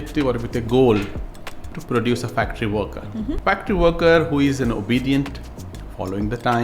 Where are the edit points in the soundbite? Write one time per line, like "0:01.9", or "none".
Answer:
0:01.8
0:03.4